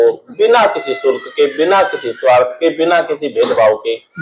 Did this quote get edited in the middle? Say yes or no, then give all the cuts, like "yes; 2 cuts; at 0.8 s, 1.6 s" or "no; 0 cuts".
no; 0 cuts